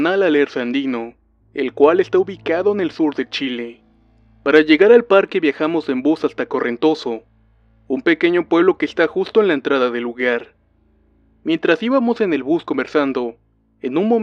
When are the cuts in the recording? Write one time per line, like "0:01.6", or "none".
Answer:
none